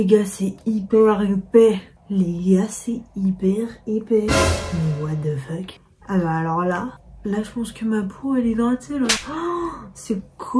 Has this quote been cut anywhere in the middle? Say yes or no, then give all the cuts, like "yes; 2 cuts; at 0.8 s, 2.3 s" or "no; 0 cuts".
no; 0 cuts